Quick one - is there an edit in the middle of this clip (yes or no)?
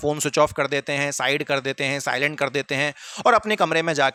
no